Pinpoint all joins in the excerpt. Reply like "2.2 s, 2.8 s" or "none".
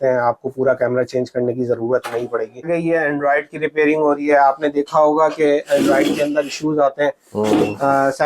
2.7 s